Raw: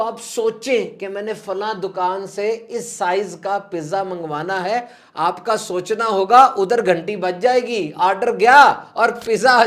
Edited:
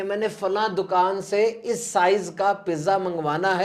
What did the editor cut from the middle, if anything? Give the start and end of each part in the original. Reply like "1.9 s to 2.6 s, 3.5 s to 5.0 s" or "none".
none